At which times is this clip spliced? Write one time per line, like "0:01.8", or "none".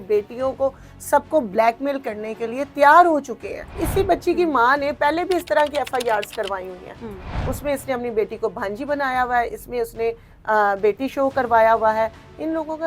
0:03.8
0:07.4